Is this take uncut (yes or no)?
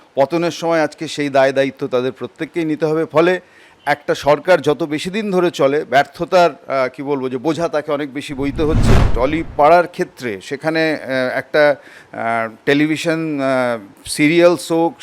no